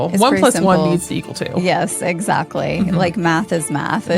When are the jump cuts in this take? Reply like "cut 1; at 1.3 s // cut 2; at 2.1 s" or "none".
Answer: none

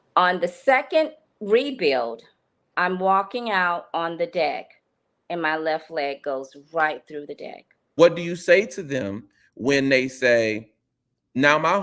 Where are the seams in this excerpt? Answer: cut 1; at 7.9 s

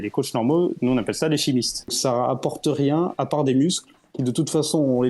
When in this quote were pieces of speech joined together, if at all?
cut 1; at 2.0 s

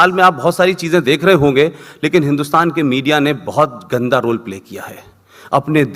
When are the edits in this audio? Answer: none

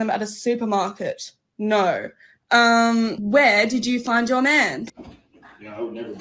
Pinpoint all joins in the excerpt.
cut 1; at 4.8 s

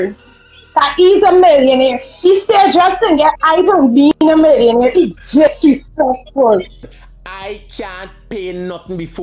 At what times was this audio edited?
cut 1; at 6.8 s

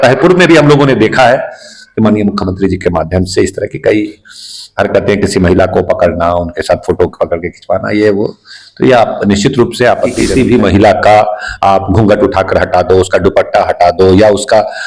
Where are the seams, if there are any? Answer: cut 1; at 10.2 s

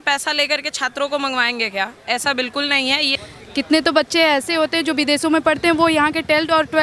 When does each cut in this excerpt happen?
cut 1; at 3.1 s

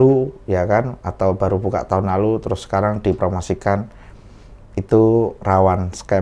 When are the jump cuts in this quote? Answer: none

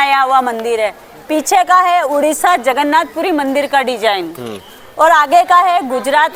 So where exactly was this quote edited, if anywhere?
none

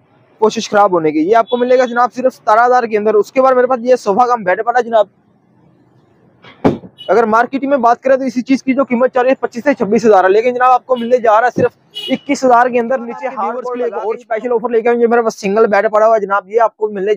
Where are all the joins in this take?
cut 1; at 13.6 s

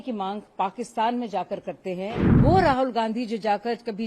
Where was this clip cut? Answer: cut 1; at 2.2 s

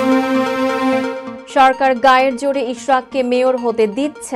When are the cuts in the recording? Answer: cut 1; at 1.3 s

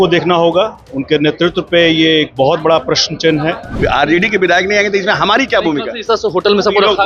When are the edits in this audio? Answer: cut 1; at 3.8 s

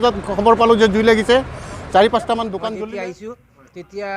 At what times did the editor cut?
cut 1; at 2.7 s

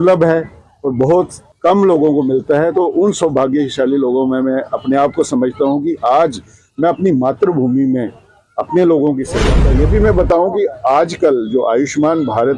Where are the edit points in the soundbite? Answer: cut 1; at 1.4 s // cut 2; at 9.6 s

